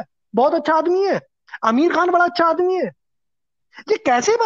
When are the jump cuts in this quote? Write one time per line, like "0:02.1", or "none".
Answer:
none